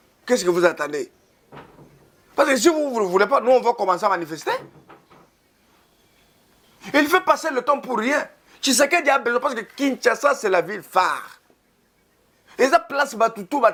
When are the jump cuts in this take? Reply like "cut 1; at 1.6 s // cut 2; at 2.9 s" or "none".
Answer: none